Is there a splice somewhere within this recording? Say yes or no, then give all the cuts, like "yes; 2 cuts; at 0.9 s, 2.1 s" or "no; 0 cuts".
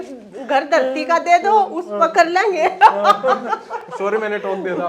no; 0 cuts